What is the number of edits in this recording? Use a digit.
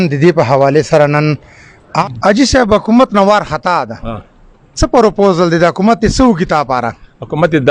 1